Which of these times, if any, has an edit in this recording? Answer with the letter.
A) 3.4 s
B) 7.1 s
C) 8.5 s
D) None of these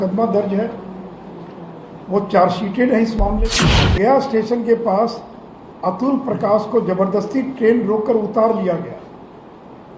A